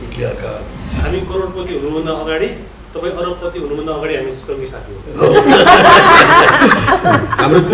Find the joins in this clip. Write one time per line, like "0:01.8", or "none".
0:01.0